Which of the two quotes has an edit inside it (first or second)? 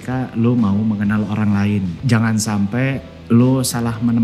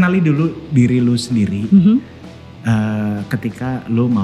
first